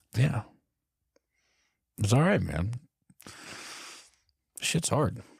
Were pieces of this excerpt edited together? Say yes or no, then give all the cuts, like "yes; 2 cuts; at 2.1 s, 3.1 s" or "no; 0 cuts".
no; 0 cuts